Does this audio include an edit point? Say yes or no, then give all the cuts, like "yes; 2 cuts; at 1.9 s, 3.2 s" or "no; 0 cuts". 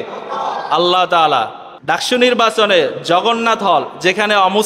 yes; 1 cut; at 1.6 s